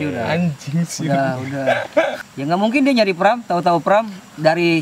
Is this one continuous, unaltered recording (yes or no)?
no